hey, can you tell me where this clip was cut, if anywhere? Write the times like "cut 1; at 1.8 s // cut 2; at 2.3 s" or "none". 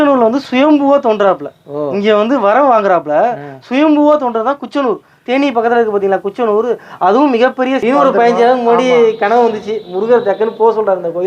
cut 1; at 7.8 s